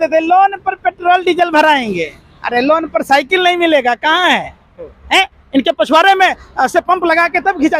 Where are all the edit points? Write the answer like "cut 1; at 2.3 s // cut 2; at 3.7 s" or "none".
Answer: none